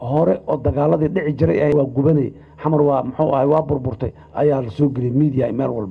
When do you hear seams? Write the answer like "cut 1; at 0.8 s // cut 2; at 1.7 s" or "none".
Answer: cut 1; at 1.7 s